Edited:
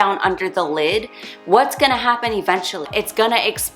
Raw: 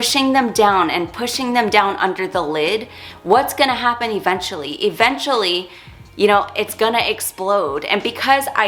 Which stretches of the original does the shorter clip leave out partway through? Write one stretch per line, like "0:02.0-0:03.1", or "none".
0:04.7-0:06.5